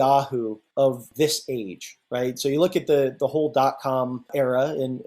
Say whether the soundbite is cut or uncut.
cut